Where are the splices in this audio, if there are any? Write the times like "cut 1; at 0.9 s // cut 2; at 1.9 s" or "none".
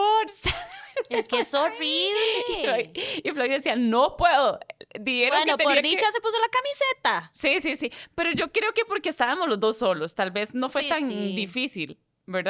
none

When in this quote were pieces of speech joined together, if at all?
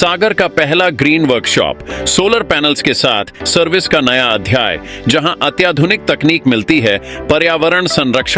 none

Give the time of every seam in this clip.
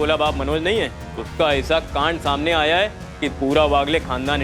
none

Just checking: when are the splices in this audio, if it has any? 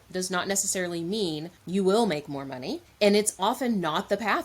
cut 1; at 1.5 s // cut 2; at 2.8 s

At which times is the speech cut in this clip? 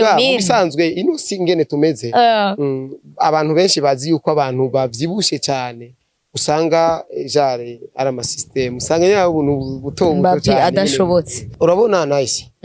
cut 1; at 11.4 s

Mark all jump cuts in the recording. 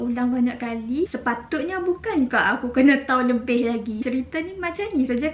cut 1; at 1.1 s // cut 2; at 4.0 s

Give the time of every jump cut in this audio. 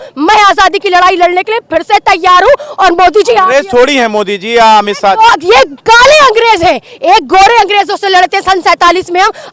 none

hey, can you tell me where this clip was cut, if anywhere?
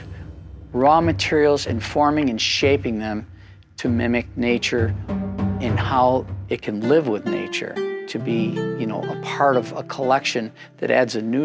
cut 1; at 7.9 s

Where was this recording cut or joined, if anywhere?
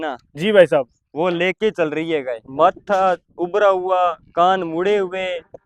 cut 1; at 2.4 s

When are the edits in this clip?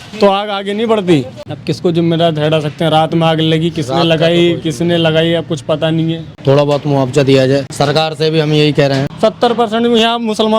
cut 1; at 1.4 s // cut 2; at 6.3 s // cut 3; at 7.7 s // cut 4; at 9.1 s

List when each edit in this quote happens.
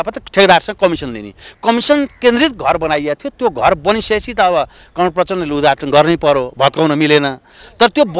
none

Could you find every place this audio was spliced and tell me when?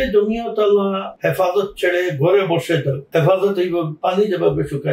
cut 1; at 1.1 s // cut 2; at 3.0 s

